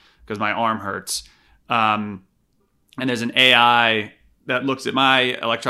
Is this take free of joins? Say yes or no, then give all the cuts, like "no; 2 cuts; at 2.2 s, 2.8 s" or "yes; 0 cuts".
yes; 0 cuts